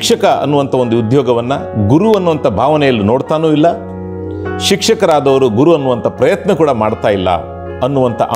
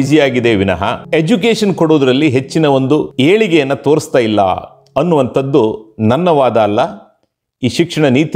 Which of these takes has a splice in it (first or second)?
second